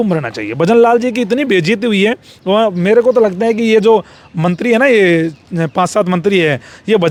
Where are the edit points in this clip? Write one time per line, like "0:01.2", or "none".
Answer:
none